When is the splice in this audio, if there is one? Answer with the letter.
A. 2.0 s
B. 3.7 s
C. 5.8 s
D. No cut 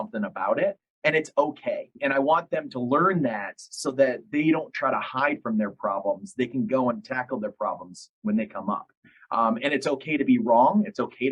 A